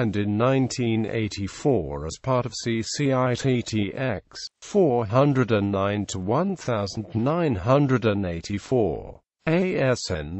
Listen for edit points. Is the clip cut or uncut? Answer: cut